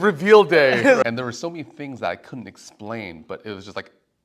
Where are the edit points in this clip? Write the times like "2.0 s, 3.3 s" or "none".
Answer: 1.0 s